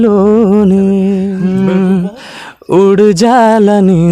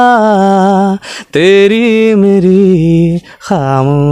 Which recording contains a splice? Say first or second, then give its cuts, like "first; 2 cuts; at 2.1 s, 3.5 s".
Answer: first; 1 cut; at 1.3 s